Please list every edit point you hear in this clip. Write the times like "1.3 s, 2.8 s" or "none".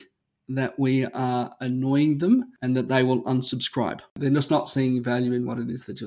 2.5 s, 4.1 s